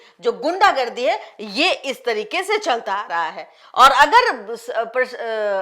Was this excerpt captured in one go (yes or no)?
yes